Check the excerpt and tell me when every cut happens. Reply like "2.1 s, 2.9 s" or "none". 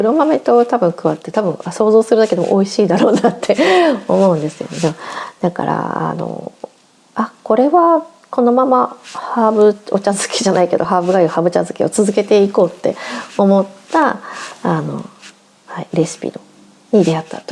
none